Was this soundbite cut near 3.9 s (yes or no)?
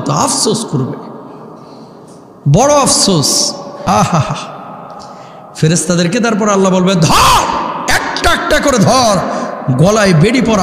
yes